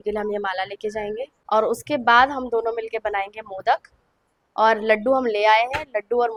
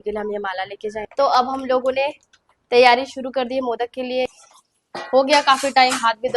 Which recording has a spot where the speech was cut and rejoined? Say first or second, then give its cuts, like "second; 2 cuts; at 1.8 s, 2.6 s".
second; 2 cuts; at 1.1 s, 4.3 s